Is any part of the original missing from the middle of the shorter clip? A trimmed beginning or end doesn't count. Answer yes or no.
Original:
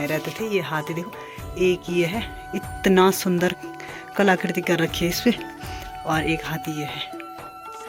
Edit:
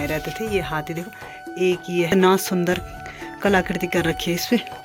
yes